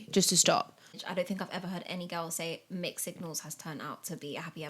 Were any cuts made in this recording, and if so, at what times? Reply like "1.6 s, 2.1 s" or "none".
1.0 s